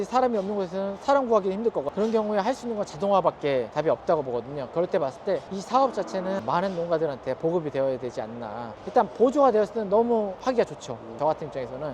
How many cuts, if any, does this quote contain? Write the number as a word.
three